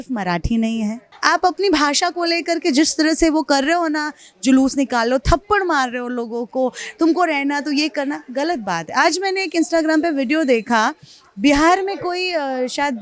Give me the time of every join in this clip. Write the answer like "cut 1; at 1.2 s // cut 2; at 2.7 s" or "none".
cut 1; at 1.1 s

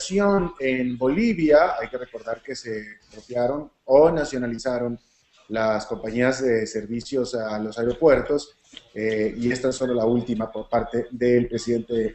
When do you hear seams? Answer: cut 1; at 10.6 s

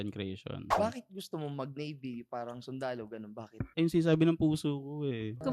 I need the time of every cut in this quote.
cut 1; at 0.7 s // cut 2; at 3.7 s

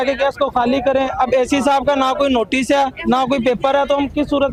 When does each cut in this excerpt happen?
none

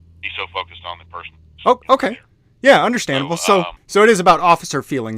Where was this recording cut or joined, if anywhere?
cut 1; at 3.8 s

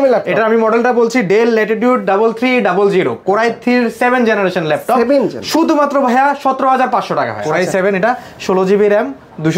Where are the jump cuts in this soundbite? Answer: cut 1; at 7.4 s

